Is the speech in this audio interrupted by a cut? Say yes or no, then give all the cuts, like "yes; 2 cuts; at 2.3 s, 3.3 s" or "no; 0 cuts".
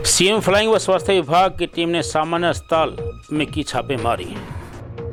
no; 0 cuts